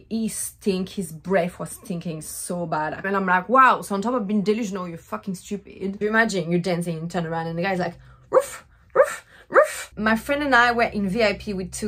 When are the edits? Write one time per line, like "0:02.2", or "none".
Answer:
0:03.1
0:06.0
0:09.8